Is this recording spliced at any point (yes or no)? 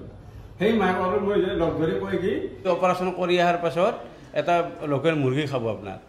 yes